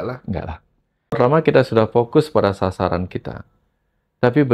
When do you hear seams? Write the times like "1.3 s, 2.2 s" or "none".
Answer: 1.2 s

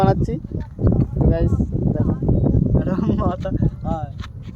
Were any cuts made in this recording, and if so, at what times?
none

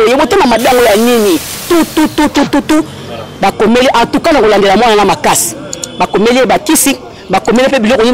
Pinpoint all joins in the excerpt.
1.6 s

